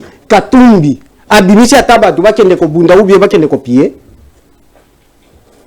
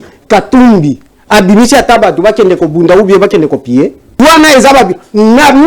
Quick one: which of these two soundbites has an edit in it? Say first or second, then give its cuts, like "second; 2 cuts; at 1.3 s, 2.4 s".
second; 1 cut; at 4.2 s